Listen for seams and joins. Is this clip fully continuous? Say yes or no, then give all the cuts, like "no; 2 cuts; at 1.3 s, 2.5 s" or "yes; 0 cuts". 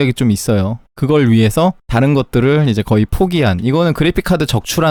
yes; 0 cuts